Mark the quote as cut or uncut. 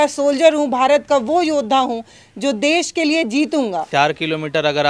cut